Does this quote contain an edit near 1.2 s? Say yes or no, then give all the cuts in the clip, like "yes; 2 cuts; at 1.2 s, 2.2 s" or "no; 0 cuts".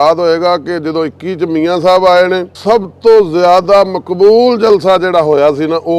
no; 1 cut; at 2.5 s